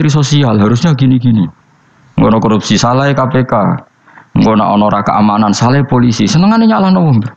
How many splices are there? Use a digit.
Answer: 0